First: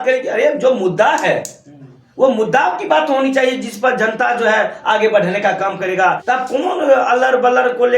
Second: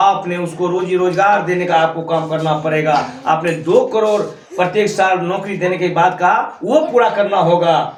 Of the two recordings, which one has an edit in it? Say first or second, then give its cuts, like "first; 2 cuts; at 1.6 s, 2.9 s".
first; 1 cut; at 6.2 s